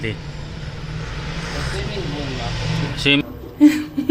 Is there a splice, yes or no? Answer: yes